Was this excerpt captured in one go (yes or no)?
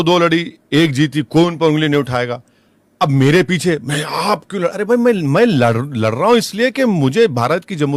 yes